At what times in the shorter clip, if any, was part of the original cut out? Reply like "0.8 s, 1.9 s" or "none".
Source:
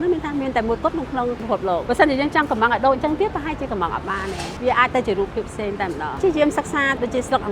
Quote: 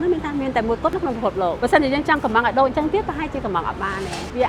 1.1 s